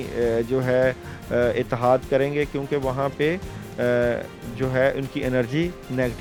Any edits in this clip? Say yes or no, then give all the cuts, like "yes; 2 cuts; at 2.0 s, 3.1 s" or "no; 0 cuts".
no; 0 cuts